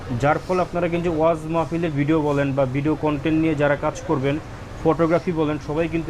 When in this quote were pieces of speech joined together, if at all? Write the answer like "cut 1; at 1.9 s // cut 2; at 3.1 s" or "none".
none